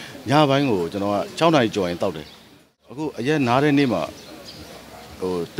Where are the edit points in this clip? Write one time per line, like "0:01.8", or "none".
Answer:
0:02.8